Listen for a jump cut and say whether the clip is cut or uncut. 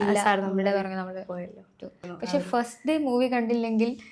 cut